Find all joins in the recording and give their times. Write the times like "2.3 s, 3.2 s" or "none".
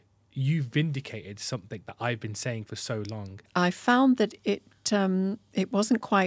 3.4 s